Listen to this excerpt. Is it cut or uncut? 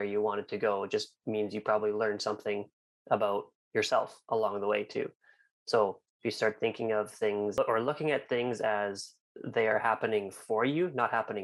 cut